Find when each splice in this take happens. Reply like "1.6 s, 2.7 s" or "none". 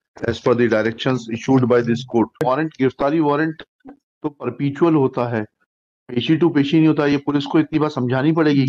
2.3 s